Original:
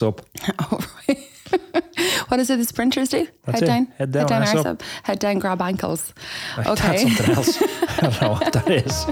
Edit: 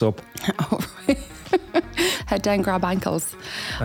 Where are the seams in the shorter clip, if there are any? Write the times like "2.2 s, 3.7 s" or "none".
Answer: 2.2 s